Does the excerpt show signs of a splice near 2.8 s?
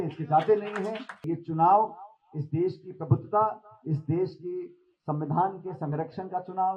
no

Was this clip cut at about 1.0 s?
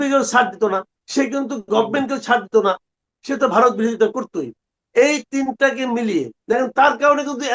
yes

